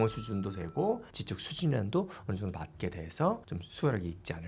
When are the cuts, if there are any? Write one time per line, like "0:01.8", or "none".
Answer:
0:01.1
0:03.6